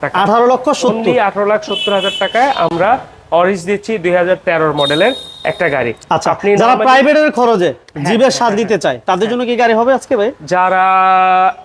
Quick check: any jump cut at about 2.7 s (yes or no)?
no